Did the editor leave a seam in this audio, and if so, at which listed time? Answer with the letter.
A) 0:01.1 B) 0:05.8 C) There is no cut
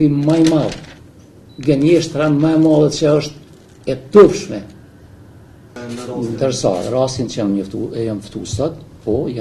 B